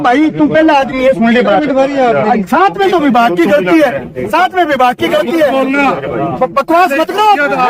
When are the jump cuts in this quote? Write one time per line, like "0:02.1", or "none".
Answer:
none